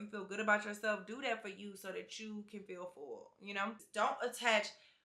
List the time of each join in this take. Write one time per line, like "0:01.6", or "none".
0:03.8